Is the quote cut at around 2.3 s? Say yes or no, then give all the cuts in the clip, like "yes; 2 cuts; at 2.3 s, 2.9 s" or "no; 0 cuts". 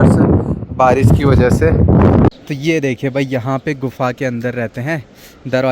yes; 1 cut; at 2.3 s